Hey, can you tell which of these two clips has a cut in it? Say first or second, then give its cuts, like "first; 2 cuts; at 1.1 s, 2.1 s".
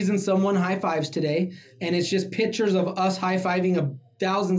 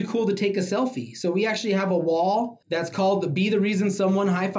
second; 1 cut; at 2.6 s